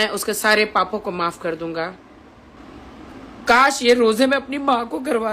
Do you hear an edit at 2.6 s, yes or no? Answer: yes